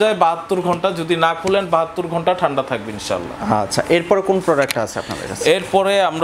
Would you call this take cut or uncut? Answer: uncut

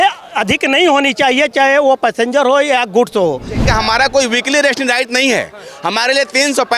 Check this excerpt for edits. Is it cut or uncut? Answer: cut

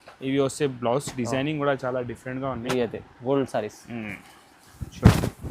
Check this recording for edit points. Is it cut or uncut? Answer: cut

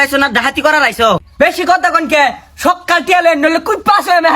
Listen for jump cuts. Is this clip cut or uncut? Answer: cut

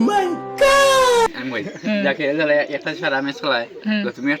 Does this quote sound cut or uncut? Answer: cut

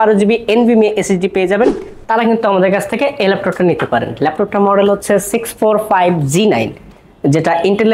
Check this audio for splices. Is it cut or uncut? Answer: cut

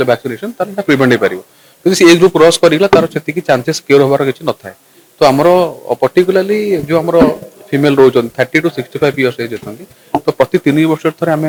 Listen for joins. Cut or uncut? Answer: uncut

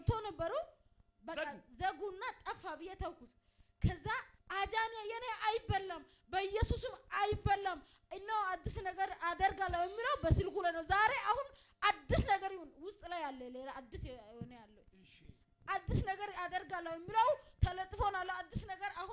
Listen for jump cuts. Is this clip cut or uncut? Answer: cut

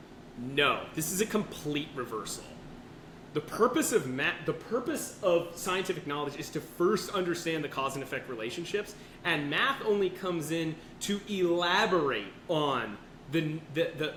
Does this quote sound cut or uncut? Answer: uncut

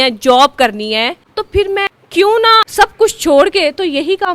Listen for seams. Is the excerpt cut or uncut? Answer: cut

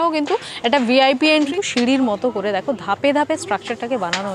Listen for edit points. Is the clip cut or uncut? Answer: cut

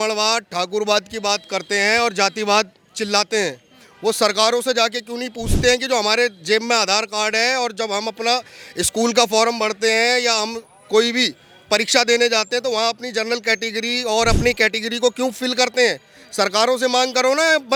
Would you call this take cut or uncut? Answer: uncut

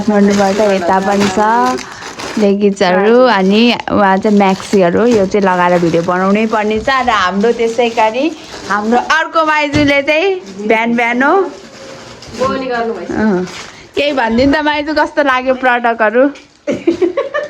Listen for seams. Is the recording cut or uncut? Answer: uncut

